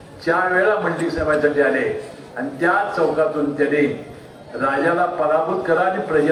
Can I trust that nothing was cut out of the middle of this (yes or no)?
yes